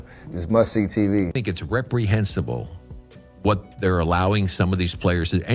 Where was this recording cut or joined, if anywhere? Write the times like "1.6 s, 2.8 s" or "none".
1.4 s